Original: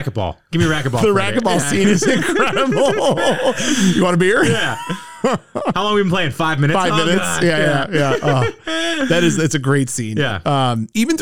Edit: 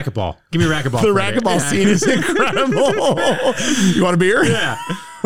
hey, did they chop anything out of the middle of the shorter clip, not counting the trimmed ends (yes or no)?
no